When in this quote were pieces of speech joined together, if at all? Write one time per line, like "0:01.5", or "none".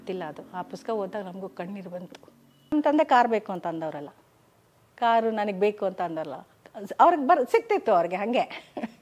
0:02.7